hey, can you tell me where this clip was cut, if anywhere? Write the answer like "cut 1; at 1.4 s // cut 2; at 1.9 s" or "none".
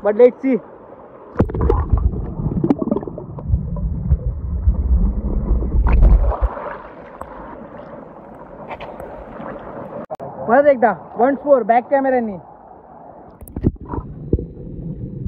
none